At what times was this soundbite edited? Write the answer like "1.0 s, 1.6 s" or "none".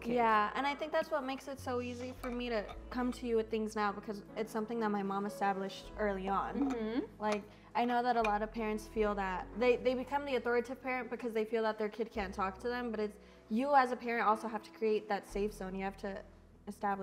none